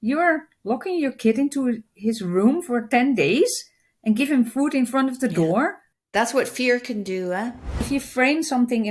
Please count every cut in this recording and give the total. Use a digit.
2